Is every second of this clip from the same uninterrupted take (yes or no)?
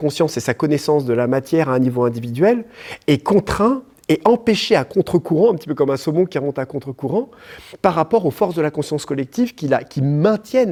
yes